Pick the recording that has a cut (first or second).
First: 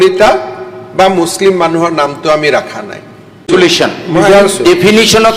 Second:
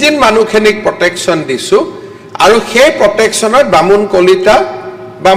first